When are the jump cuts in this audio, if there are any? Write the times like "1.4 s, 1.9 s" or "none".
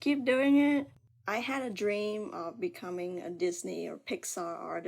1.0 s